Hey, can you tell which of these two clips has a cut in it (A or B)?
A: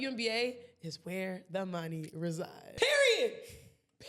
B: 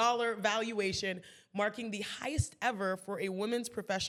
A